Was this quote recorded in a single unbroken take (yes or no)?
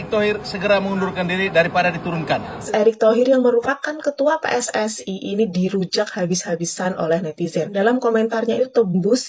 no